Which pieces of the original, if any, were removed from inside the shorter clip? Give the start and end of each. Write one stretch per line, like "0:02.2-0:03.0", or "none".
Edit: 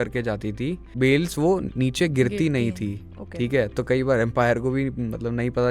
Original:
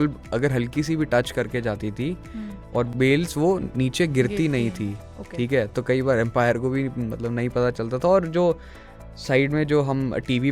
0:02.3-0:02.9